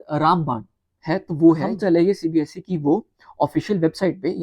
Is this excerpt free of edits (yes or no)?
no